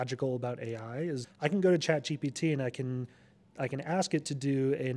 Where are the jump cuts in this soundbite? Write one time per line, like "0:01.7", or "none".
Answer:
0:01.3